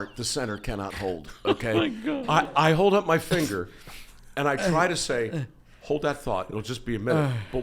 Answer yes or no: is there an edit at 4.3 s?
no